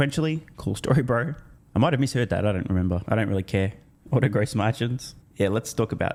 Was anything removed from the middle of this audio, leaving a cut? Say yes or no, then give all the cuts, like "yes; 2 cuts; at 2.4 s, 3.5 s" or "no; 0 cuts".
no; 0 cuts